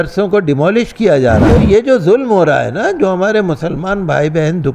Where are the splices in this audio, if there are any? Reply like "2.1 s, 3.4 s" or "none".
1.5 s